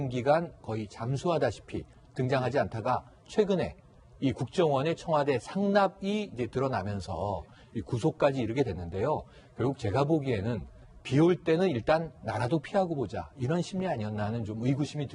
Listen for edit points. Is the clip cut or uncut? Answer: uncut